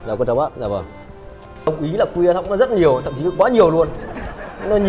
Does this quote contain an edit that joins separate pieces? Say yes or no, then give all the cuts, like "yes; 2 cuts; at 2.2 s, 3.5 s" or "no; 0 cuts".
yes; 1 cut; at 1.7 s